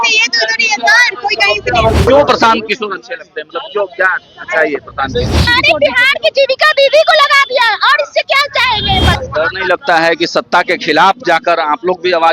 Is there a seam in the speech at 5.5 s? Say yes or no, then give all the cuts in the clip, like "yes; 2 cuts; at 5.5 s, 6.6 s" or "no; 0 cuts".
yes; 3 cuts; at 2.0 s, 5.5 s, 9.2 s